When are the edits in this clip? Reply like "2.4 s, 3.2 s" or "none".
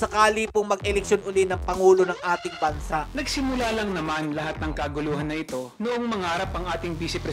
3.1 s

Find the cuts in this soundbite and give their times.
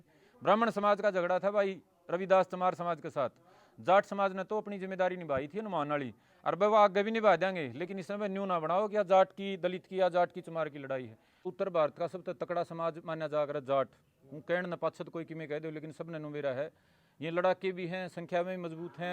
11.5 s

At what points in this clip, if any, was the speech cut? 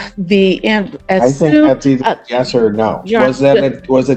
none

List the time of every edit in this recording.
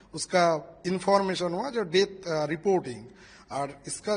none

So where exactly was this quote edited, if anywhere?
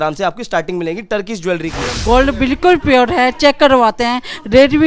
2.0 s

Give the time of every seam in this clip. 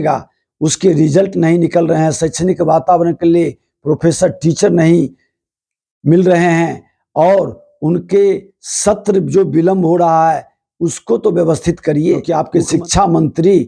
12.3 s

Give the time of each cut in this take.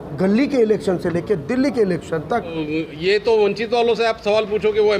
2.6 s

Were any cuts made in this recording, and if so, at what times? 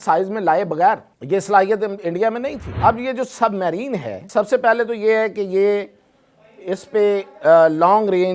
1.1 s, 2.7 s, 4.2 s

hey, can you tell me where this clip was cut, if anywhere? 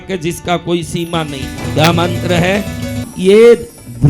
1.6 s, 3.0 s

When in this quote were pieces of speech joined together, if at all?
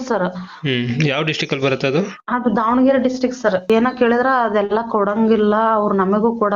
3.7 s

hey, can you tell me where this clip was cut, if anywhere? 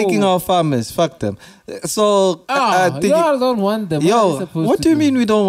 none

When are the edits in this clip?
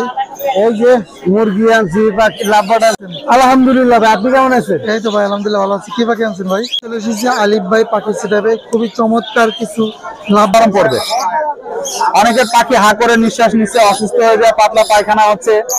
3.0 s, 6.8 s, 10.5 s

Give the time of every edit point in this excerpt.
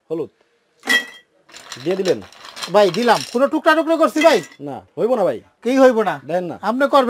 4.9 s

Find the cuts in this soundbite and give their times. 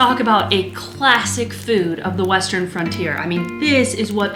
none

